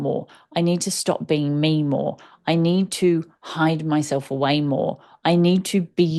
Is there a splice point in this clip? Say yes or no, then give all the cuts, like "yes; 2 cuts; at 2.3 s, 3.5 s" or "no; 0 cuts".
no; 0 cuts